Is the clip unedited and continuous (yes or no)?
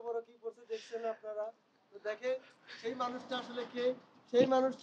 yes